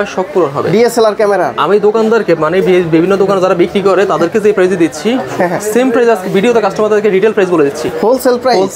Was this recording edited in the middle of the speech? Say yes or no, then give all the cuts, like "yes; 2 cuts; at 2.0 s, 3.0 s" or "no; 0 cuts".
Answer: no; 0 cuts